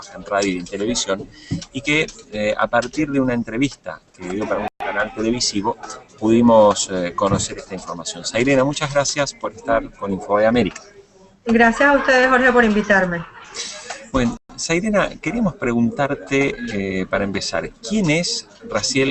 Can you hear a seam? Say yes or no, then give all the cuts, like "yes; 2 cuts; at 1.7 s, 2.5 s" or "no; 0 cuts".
no; 0 cuts